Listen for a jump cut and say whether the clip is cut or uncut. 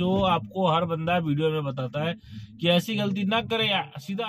uncut